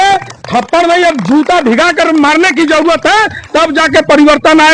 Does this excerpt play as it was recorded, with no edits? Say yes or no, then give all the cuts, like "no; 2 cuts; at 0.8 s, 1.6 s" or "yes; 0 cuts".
yes; 0 cuts